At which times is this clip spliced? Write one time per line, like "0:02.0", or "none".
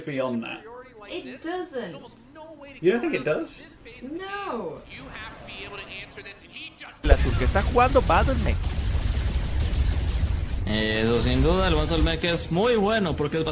0:07.0